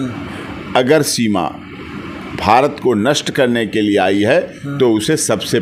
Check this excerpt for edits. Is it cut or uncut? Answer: uncut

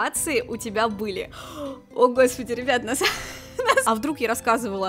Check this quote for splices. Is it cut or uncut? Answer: cut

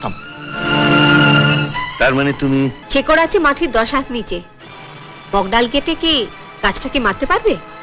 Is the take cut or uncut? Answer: cut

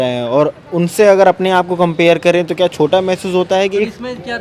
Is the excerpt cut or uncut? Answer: cut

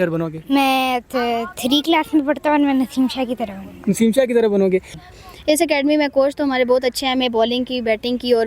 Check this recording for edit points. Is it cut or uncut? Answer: cut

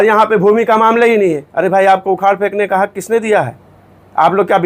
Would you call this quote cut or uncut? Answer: cut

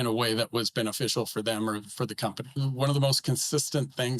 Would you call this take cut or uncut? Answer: cut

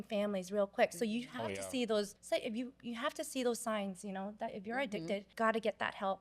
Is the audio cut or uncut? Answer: cut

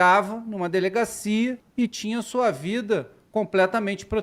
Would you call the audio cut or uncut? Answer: cut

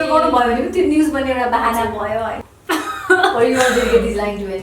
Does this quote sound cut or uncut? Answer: cut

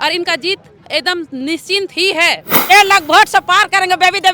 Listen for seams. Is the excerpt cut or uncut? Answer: cut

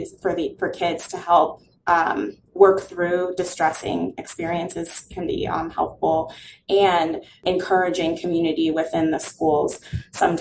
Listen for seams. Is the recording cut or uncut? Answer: cut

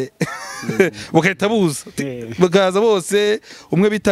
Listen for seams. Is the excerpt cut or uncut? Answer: uncut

